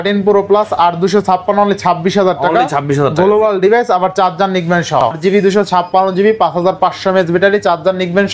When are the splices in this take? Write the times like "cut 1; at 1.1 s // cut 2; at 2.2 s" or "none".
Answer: cut 1; at 5.2 s